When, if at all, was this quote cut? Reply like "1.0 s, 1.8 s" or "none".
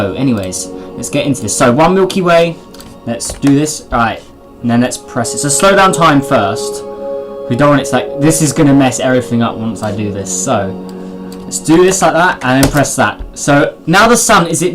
4.4 s